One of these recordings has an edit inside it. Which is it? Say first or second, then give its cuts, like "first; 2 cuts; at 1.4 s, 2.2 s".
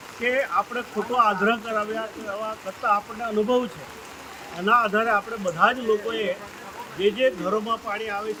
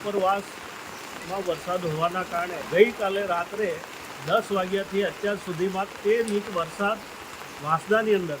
second; 1 cut; at 2.6 s